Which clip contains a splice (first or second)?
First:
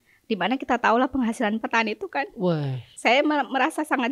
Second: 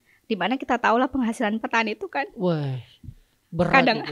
first